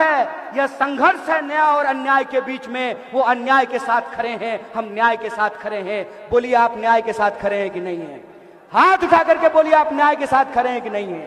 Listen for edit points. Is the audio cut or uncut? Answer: uncut